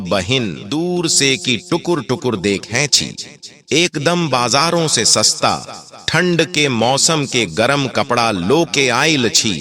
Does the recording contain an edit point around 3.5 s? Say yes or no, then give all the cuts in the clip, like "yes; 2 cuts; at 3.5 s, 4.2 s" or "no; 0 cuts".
yes; 1 cut; at 3.5 s